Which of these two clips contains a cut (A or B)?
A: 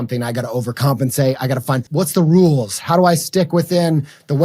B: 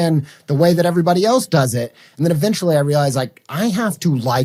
A